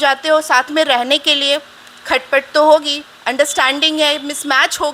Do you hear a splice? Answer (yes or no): no